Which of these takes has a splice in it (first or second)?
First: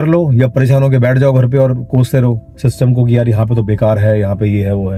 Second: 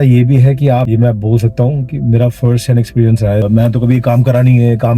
second